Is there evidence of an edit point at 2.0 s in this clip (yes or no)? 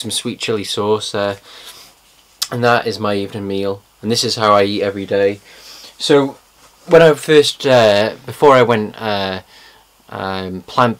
no